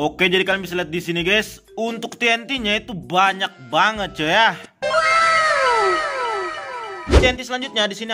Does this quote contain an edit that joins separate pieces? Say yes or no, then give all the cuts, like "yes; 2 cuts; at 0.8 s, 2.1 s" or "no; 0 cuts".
yes; 1 cut; at 7.2 s